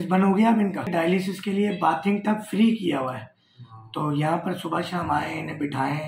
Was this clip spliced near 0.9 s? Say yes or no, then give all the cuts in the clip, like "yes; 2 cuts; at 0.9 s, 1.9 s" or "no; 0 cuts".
yes; 1 cut; at 0.9 s